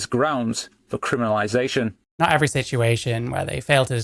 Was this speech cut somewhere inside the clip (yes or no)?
yes